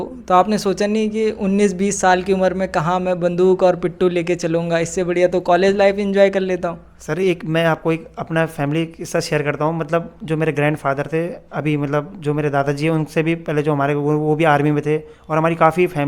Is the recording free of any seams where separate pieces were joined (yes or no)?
yes